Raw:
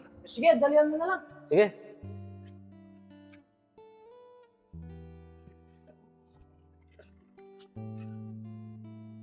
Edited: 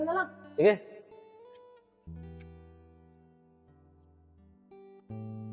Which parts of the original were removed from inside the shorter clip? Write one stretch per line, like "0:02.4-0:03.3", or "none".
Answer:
0:02.0-0:03.7